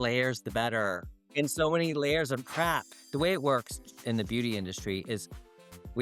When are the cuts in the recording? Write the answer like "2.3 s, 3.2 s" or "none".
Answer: 1.2 s, 3.0 s